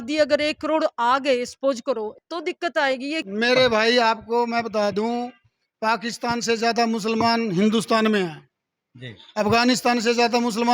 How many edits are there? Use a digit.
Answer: 2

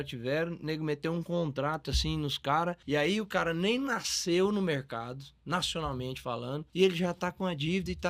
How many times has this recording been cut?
2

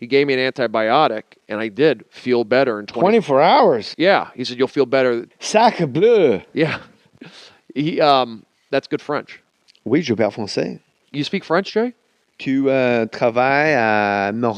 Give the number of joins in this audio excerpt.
1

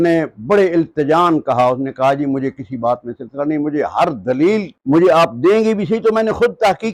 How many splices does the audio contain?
0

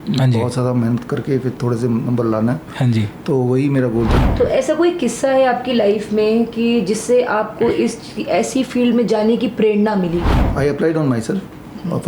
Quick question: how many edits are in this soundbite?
2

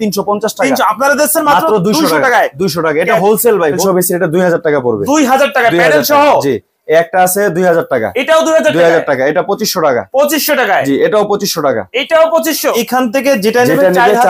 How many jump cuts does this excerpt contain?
2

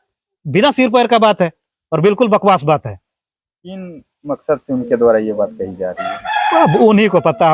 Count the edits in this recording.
0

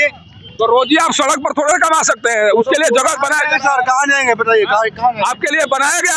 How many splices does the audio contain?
0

